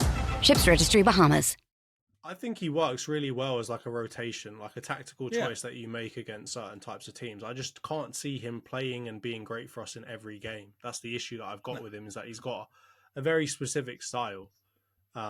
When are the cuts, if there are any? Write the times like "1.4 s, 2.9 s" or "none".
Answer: 2.2 s